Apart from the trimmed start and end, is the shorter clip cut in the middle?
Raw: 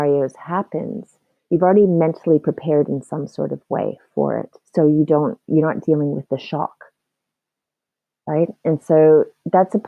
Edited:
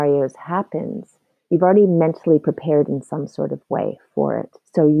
no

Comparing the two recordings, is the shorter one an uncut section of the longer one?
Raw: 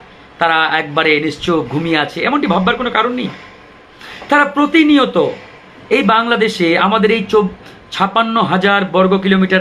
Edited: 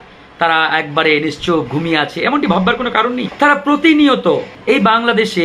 no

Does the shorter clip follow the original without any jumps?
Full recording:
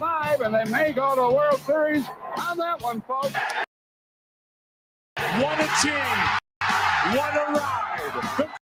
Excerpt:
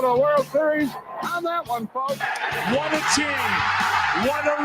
no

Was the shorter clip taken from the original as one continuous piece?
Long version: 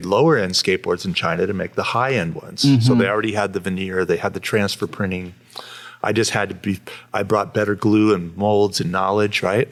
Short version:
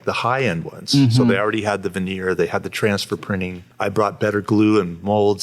no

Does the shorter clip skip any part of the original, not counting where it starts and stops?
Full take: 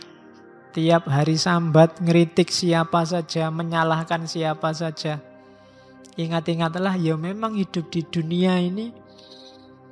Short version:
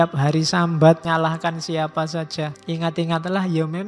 yes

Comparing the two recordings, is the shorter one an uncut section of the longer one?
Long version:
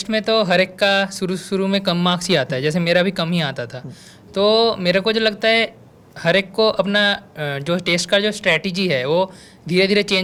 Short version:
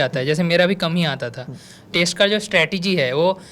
no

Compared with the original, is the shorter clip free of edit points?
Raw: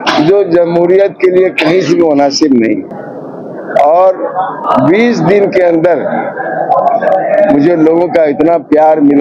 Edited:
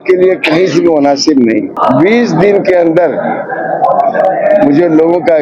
no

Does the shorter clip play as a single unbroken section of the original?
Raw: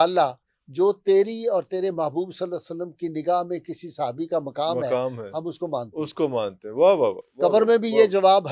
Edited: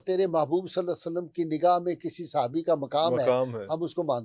yes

